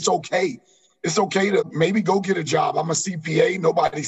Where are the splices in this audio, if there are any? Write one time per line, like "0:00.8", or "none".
0:01.7